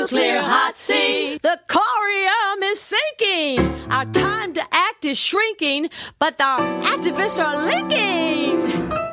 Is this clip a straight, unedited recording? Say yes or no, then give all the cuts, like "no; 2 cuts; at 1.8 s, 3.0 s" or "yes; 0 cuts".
yes; 0 cuts